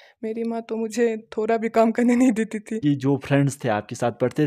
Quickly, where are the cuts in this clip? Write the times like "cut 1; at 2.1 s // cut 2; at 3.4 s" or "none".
cut 1; at 2.8 s